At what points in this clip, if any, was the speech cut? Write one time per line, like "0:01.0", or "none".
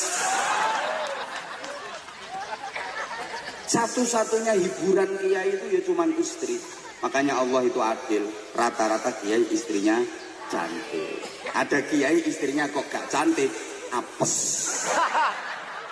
none